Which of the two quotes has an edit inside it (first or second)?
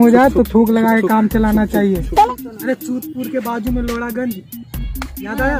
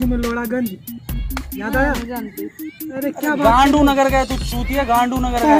first